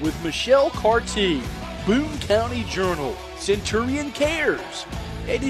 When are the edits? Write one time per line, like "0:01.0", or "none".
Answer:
none